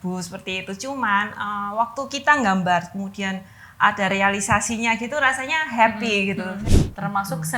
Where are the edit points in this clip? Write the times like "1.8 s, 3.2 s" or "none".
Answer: 6.6 s